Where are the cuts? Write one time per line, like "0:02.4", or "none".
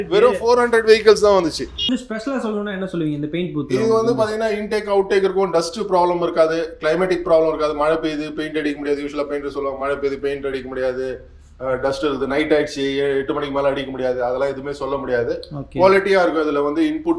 0:01.9

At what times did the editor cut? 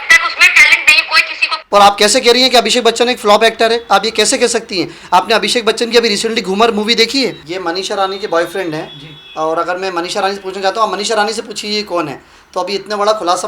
0:01.7
0:07.5

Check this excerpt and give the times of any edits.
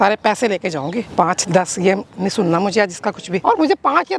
0:01.0
0:03.4

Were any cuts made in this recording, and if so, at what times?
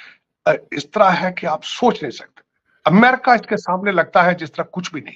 none

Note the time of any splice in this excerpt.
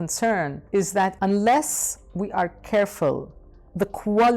0:01.0

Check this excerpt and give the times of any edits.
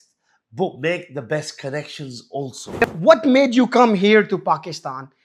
0:02.8

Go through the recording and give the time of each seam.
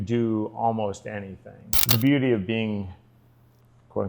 0:01.9

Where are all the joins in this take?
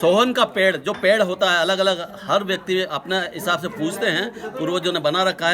none

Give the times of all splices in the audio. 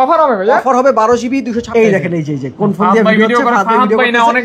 0:01.7

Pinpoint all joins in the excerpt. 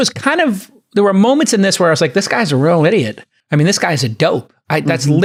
none

